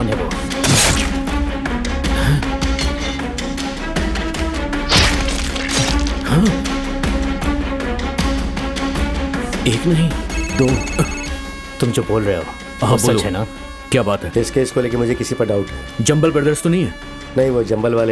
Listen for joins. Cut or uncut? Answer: uncut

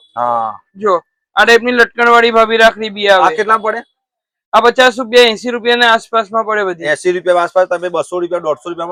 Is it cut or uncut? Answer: uncut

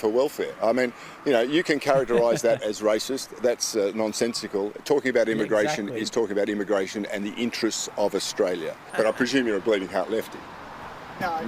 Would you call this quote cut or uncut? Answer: cut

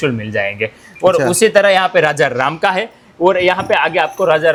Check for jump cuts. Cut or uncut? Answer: uncut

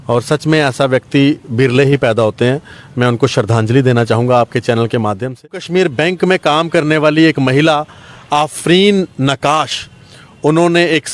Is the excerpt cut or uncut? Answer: cut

